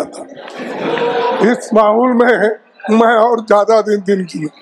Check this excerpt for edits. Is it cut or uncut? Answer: uncut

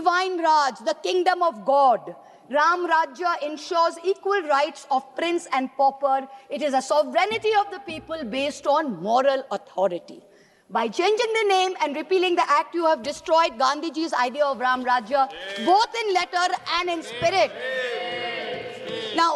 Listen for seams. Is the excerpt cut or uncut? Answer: uncut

